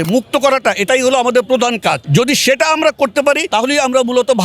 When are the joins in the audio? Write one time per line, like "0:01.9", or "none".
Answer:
0:02.0
0:03.4